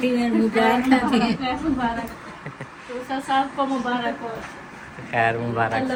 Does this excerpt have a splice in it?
no; 0 cuts

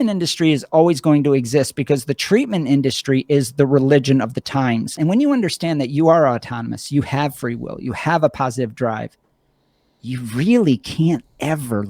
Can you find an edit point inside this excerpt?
yes; 1 cut; at 4.9 s

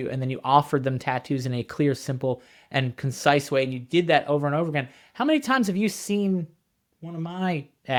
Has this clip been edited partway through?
no; 0 cuts

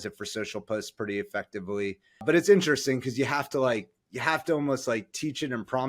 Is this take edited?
yes; 1 cut; at 2.2 s

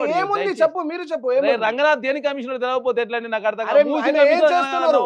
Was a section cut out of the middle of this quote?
no; 0 cuts

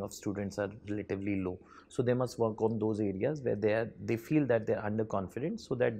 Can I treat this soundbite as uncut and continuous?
yes; 0 cuts

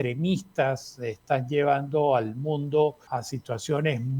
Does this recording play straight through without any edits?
no; 1 cut; at 3.0 s

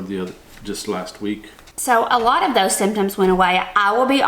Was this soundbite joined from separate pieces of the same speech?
yes; 1 cut; at 1.6 s

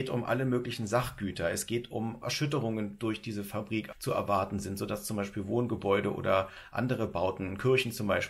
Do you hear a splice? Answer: yes; 2 cuts; at 2.2 s, 3.9 s

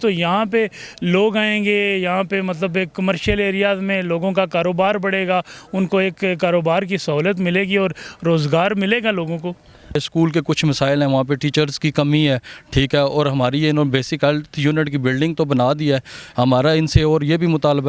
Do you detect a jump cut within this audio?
yes; 1 cut; at 9.9 s

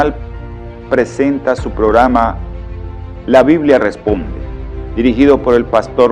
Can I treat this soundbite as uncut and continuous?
no; 1 cut; at 1.2 s

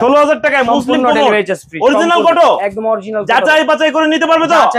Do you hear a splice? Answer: no; 0 cuts

